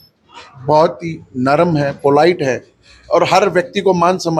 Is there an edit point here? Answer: no; 0 cuts

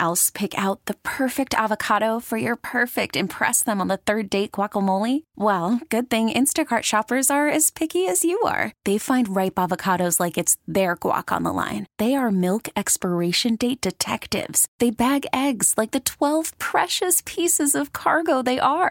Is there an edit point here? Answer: no; 0 cuts

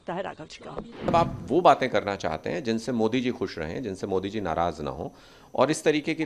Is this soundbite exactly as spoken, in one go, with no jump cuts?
no; 1 cut; at 1.1 s

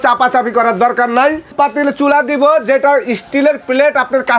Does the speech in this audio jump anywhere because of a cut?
yes; 1 cut; at 1.5 s

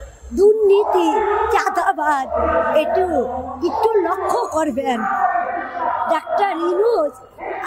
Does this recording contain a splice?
no; 0 cuts

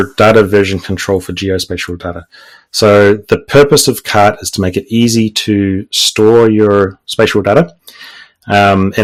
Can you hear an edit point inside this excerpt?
no; 0 cuts

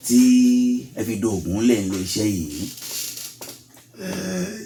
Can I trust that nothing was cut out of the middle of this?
yes; 0 cuts

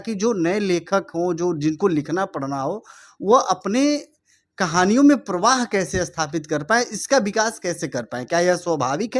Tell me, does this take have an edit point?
no; 0 cuts

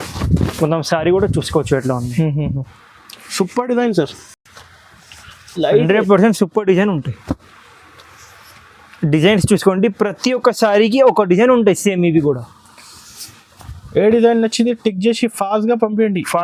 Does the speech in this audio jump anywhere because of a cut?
no; 0 cuts

